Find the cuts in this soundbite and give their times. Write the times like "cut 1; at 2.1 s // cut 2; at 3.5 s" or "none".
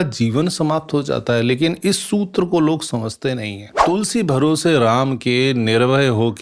cut 1; at 3.7 s